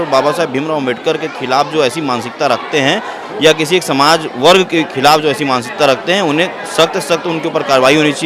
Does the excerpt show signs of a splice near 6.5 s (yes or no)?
no